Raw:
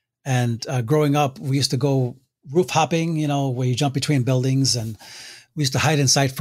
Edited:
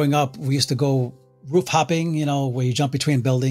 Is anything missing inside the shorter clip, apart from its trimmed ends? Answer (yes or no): no